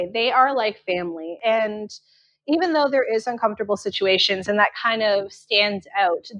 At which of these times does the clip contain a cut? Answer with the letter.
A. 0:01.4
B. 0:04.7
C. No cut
A